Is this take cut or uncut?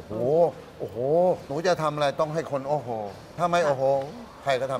cut